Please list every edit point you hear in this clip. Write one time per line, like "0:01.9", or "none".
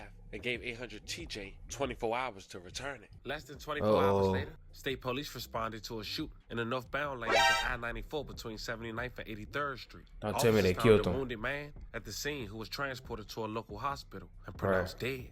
0:03.2
0:04.6